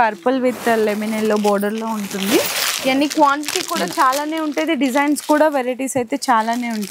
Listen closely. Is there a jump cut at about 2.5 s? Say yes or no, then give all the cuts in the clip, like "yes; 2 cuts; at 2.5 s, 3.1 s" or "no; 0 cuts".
no; 0 cuts